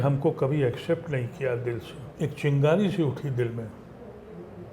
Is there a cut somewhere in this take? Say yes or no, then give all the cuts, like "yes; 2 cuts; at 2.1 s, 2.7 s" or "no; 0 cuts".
yes; 1 cut; at 2.0 s